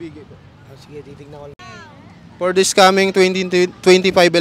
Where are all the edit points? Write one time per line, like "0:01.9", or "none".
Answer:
0:01.6

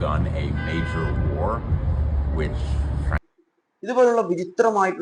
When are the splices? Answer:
0:03.1

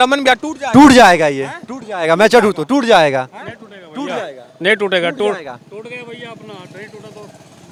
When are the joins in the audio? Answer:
none

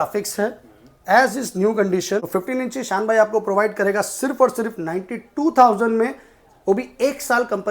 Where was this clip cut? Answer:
0:02.2

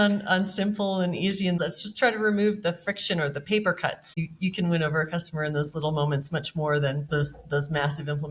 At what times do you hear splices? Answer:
0:01.6
0:04.2
0:07.1

